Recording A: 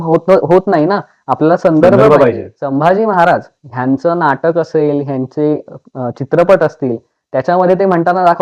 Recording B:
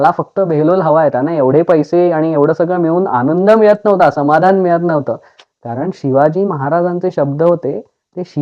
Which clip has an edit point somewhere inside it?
A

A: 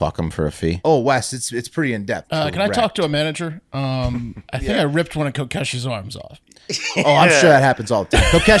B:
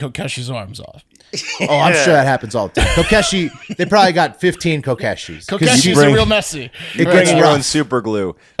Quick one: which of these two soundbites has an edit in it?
A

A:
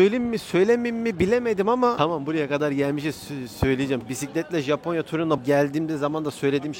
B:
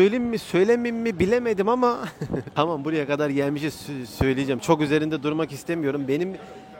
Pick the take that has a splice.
A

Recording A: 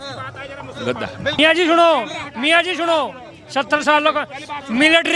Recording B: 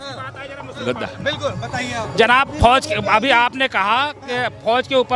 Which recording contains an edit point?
A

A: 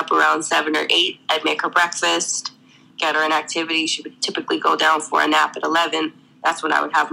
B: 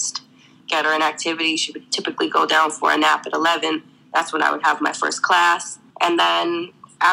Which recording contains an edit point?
B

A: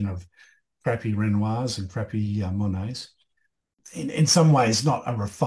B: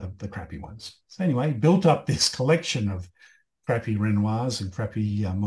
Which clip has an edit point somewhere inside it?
A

